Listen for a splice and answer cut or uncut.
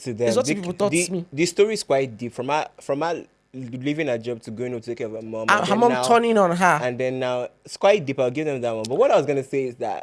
uncut